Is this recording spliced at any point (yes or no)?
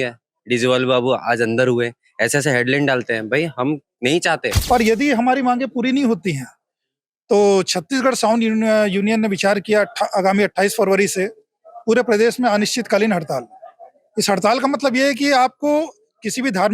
yes